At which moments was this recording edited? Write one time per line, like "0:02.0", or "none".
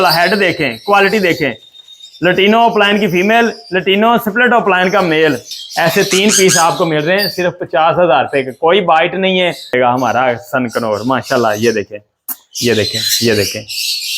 0:05.5
0:09.7